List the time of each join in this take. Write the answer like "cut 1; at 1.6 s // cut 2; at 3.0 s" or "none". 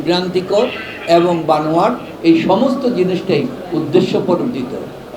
cut 1; at 2.1 s